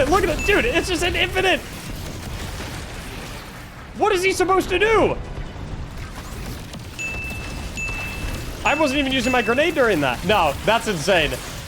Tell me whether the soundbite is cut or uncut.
cut